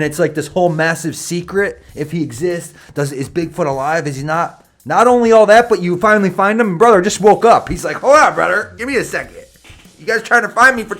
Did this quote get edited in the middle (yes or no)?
no